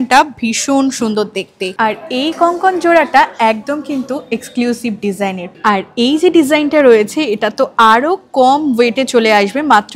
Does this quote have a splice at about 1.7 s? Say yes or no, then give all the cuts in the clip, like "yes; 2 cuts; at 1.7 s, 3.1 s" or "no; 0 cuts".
yes; 2 cuts; at 1.7 s, 5.6 s